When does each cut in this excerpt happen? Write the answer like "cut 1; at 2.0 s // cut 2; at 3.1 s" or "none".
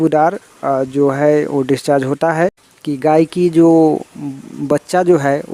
cut 1; at 2.7 s